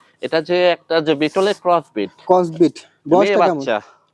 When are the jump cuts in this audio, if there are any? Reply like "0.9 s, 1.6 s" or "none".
none